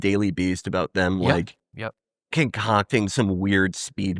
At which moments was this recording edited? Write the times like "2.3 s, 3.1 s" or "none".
2.2 s